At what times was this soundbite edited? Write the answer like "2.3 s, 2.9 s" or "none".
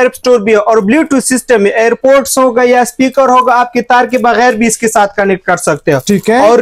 none